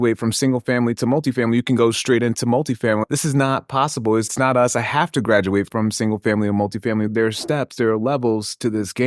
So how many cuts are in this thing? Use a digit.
4